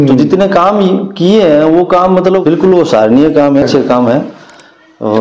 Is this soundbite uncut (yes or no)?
no